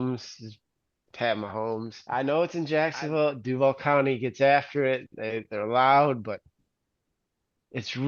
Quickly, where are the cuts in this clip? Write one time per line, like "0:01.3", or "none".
0:01.9

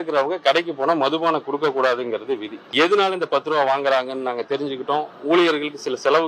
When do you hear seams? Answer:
0:02.5

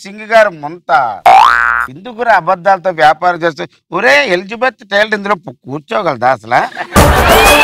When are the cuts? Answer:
none

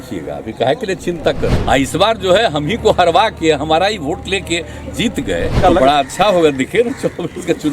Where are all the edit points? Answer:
0:01.5
0:05.6

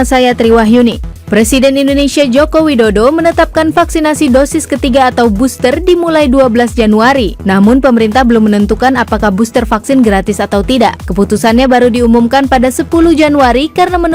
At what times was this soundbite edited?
0:01.1

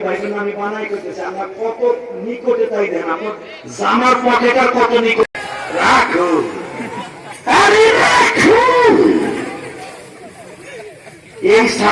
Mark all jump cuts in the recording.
0:05.2

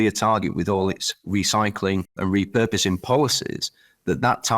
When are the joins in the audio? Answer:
0:02.2

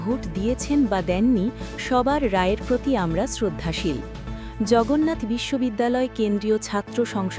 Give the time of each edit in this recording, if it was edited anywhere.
none

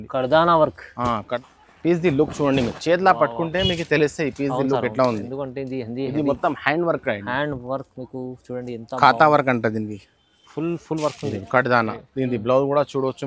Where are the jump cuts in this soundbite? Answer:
0:01.3

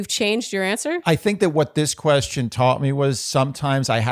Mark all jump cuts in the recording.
0:01.0

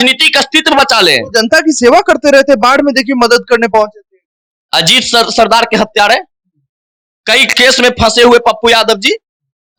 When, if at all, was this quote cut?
none

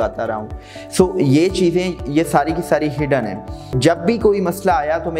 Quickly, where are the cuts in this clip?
0:03.8

